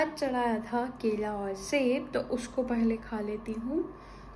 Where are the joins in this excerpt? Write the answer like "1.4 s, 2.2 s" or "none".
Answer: none